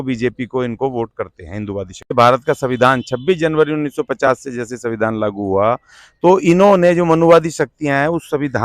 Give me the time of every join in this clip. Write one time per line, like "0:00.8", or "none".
0:02.1